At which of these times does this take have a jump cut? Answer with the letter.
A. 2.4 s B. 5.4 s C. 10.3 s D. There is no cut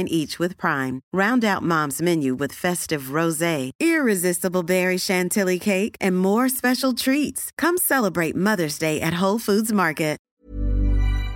C